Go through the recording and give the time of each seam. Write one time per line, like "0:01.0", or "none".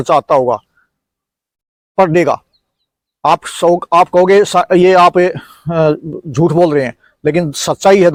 none